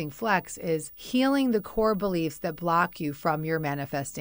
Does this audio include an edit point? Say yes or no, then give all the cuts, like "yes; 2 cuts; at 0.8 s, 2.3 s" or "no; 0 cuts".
yes; 1 cut; at 0.9 s